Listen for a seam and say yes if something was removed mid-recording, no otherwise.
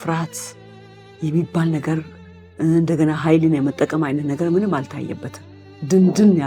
no